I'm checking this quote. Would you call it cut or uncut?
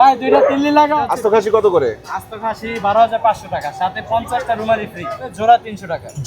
cut